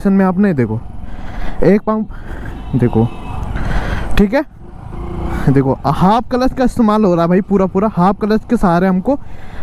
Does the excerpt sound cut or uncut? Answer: uncut